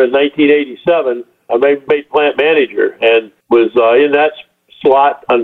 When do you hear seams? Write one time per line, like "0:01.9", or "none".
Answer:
0:01.8
0:03.3